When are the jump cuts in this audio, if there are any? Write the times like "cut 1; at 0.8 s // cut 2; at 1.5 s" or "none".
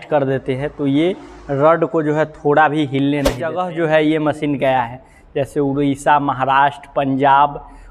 cut 1; at 3.6 s